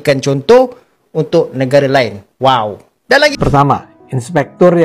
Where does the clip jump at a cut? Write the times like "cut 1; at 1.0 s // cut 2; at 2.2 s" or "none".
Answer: cut 1; at 3.3 s